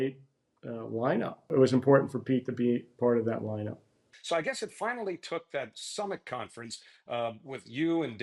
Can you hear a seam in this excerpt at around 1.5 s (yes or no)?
yes